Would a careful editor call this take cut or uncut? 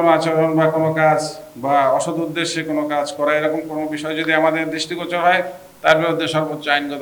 uncut